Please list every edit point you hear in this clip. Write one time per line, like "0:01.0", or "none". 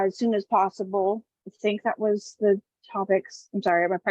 0:01.3